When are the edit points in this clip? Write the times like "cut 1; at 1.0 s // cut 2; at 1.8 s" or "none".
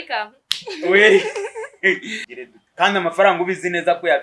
cut 1; at 2.2 s